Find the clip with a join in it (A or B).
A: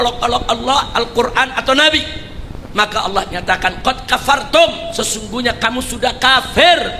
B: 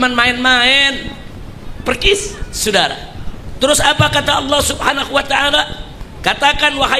B